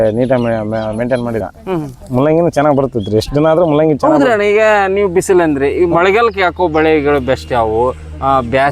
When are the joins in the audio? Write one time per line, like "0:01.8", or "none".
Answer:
0:01.5